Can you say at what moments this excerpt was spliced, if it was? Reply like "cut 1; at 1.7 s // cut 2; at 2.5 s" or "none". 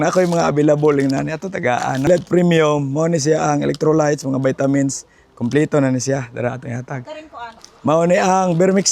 cut 1; at 2.1 s // cut 2; at 7.5 s